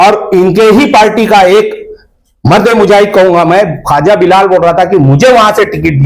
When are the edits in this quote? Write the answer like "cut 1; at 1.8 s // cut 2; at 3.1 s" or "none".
none